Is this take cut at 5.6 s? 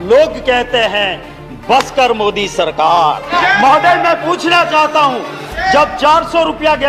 no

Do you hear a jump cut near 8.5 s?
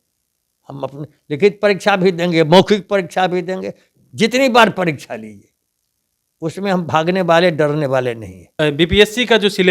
yes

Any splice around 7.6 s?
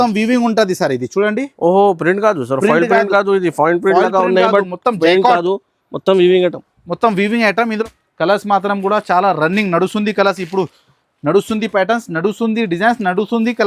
yes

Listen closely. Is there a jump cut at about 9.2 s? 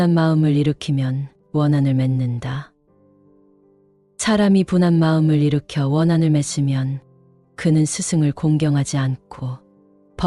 no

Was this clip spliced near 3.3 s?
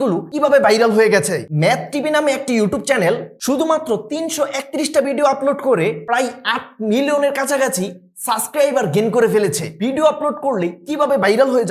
no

